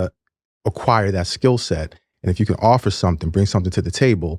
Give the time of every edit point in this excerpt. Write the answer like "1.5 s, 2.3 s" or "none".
none